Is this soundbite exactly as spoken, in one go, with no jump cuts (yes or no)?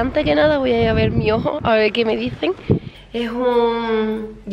no